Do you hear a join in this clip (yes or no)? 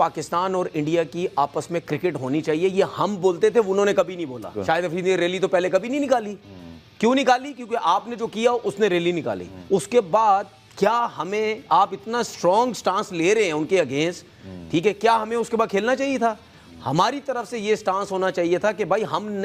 yes